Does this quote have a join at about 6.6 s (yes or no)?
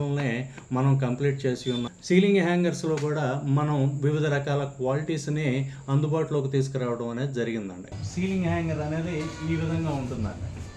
no